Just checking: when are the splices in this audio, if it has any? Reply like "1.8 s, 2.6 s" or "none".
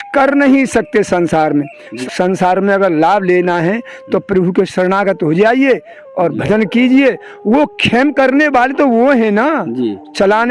1.9 s